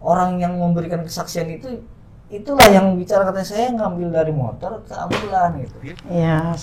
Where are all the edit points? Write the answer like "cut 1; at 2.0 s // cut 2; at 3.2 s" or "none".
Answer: cut 1; at 5.7 s